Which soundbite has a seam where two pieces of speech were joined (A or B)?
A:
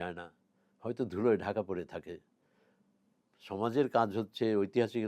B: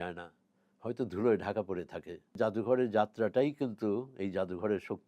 B